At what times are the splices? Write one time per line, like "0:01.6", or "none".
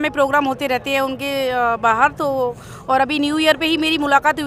none